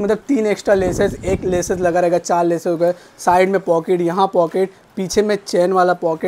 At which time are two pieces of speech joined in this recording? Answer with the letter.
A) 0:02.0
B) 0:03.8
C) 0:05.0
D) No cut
D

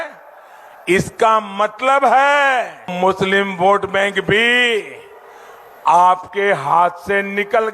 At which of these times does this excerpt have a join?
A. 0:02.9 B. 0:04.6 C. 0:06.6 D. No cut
A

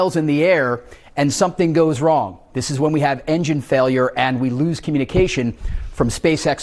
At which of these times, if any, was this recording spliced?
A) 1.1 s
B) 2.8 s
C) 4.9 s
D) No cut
D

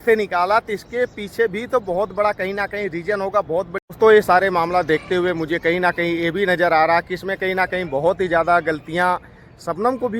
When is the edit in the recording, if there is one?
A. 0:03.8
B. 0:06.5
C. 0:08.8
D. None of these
A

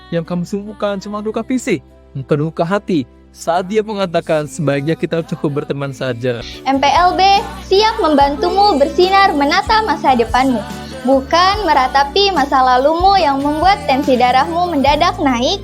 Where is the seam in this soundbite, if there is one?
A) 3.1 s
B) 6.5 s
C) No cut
B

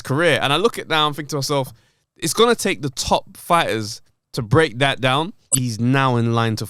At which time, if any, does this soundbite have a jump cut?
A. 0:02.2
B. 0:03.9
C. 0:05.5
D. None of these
C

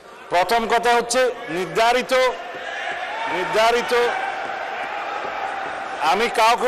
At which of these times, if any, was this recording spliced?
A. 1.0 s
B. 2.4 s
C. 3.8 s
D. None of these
D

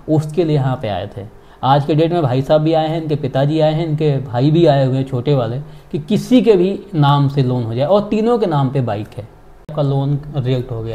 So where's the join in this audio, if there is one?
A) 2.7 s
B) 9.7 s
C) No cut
B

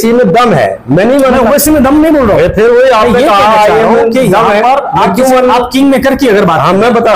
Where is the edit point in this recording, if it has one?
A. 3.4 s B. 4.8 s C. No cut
C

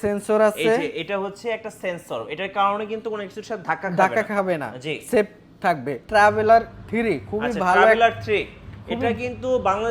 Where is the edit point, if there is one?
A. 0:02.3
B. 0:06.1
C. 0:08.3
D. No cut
B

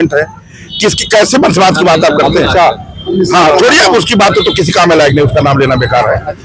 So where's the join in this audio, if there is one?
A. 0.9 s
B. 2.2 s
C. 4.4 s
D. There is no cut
D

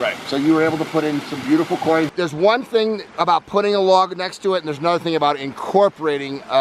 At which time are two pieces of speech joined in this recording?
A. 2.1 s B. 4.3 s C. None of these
A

